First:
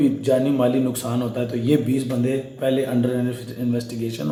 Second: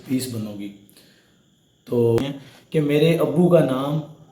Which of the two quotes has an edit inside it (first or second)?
second